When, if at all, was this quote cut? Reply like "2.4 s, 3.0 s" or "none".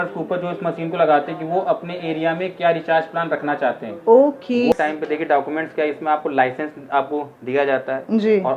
4.7 s